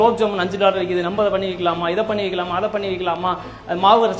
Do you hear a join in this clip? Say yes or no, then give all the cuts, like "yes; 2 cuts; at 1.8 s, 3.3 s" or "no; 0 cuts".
no; 0 cuts